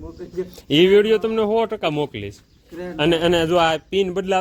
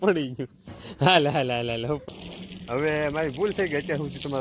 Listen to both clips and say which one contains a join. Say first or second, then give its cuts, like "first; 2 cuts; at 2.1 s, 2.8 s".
second; 1 cut; at 2.1 s